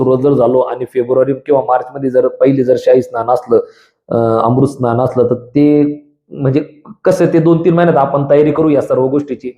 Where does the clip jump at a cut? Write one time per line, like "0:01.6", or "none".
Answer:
none